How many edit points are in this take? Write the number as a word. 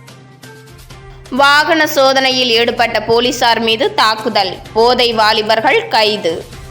one